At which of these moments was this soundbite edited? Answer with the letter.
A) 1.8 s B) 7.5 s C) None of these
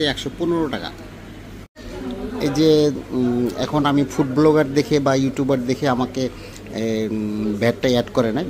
A